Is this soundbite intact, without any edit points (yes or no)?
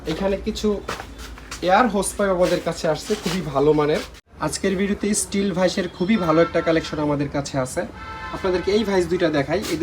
no